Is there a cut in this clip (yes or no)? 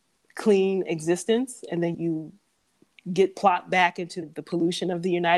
yes